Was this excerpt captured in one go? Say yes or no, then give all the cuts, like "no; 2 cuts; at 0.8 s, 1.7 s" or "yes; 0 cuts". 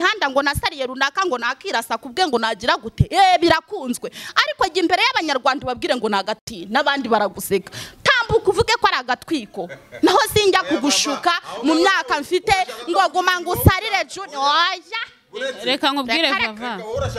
yes; 0 cuts